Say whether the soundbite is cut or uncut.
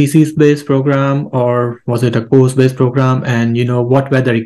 uncut